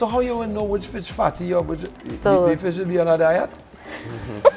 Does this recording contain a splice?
no; 0 cuts

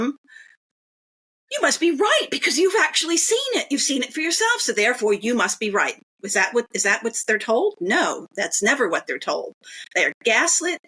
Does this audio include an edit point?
no; 0 cuts

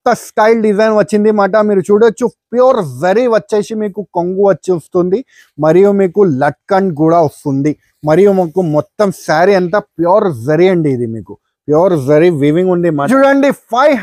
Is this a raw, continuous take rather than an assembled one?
no; 1 cut; at 13.0 s

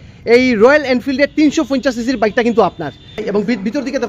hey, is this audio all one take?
no; 1 cut; at 3.2 s

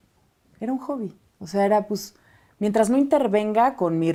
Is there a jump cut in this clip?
no; 0 cuts

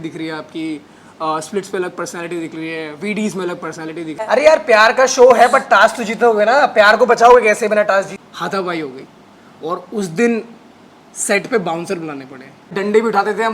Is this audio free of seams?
no; 3 cuts; at 4.2 s, 8.1 s, 12.7 s

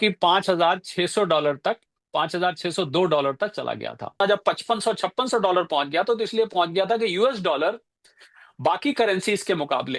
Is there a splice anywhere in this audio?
yes; 1 cut; at 4.2 s

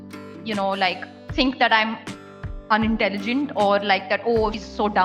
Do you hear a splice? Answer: yes; 1 cut; at 1.1 s

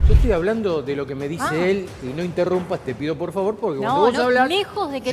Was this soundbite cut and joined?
no; 0 cuts

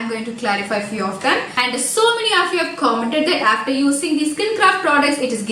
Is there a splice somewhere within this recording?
yes; 1 cut; at 1.5 s

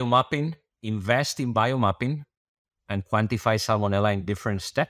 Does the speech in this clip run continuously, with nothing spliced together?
yes; 0 cuts

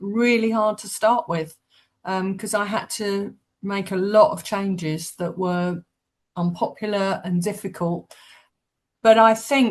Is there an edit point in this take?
no; 0 cuts

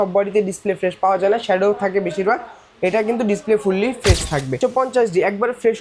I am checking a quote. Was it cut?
yes; 1 cut; at 4.6 s

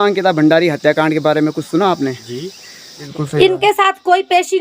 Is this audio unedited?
no; 1 cut; at 2.9 s

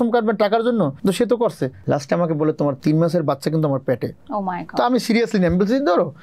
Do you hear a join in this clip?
yes; 4 cuts; at 1.0 s, 1.8 s, 2.8 s, 4.2 s

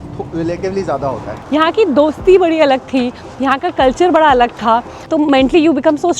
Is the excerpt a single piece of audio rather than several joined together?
no; 2 cuts; at 1.3 s, 5.0 s

